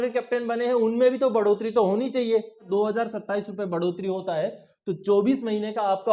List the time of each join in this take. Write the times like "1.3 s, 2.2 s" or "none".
2.7 s